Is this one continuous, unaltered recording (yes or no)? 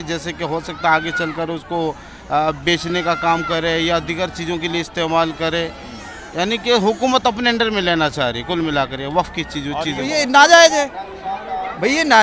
no